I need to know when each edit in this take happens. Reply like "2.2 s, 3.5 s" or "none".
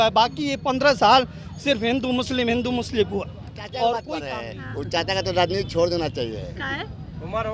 4.3 s

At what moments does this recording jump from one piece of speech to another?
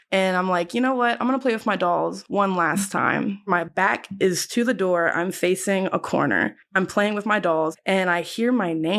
3.5 s

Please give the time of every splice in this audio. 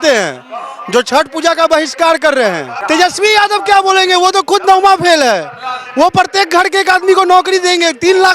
2.7 s

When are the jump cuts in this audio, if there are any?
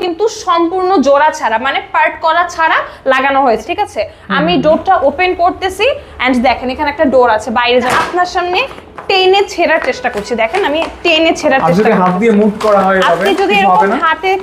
3.7 s, 7.9 s

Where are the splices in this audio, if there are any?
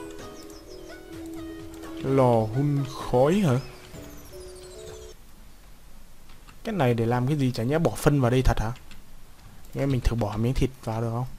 5.1 s

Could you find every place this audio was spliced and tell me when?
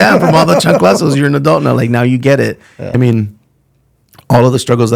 2.9 s

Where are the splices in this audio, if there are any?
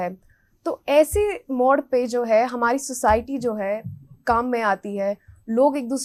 none

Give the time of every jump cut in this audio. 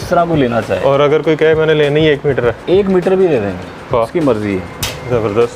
2.6 s

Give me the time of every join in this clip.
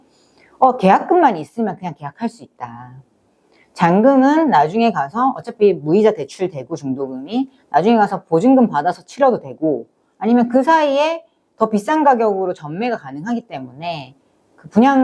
none

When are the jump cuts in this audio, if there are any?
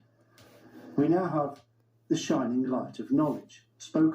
none

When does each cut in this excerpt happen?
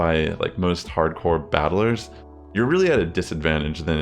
none

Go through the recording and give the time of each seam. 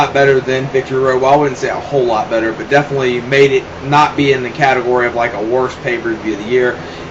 1.2 s

